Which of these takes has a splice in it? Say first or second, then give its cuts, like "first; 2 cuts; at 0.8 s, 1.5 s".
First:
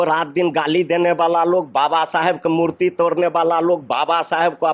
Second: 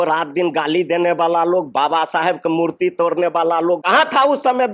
second; 1 cut; at 3.8 s